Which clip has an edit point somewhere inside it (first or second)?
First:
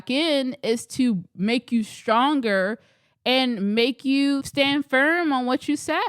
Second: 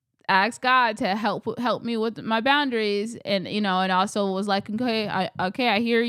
first